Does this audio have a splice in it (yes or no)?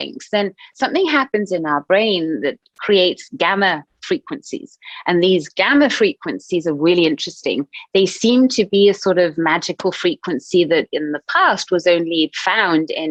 no